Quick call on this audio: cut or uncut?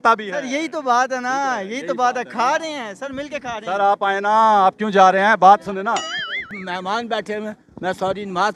cut